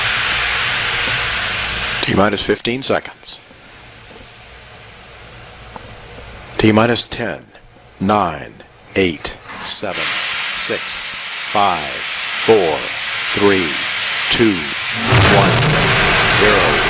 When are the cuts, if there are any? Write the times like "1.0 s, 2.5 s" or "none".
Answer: 11.9 s